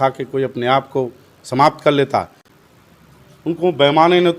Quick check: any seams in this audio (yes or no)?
yes